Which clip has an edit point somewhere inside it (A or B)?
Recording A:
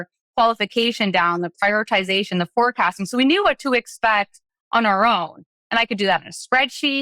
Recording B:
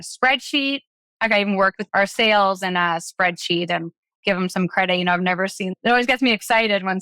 B